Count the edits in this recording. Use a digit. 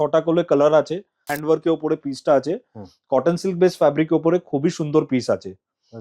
1